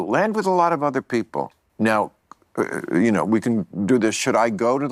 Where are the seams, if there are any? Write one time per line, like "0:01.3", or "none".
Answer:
0:01.4